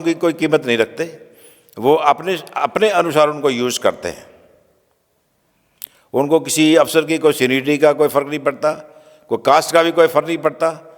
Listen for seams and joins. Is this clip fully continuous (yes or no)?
yes